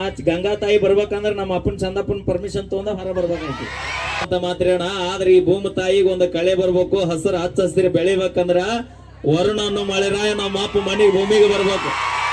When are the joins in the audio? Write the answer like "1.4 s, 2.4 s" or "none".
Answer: 4.3 s